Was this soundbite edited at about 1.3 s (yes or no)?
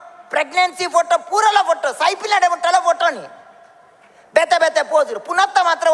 no